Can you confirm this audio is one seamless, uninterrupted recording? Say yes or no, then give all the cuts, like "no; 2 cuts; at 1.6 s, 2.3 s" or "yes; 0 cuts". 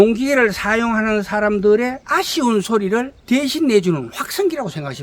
no; 2 cuts; at 2.0 s, 3.2 s